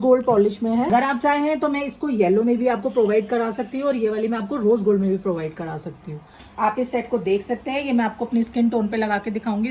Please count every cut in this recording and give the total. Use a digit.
2